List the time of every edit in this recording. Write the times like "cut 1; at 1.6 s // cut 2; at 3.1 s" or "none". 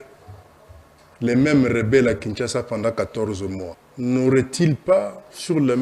cut 1; at 3.8 s